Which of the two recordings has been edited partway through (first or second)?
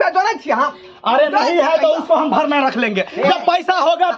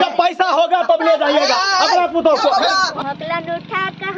second